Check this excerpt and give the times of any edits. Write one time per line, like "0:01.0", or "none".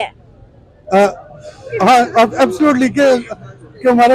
none